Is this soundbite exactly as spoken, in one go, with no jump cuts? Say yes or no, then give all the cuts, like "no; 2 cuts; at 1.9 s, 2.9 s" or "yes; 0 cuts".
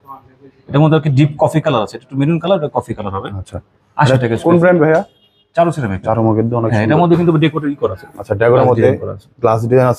yes; 0 cuts